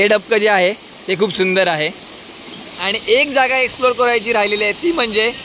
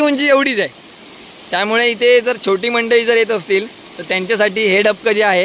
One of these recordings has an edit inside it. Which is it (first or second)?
first